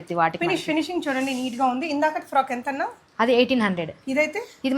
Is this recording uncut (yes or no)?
yes